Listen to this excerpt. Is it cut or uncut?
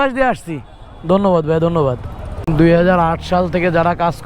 cut